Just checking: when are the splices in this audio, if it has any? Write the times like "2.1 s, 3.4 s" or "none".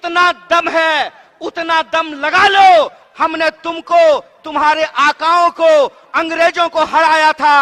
none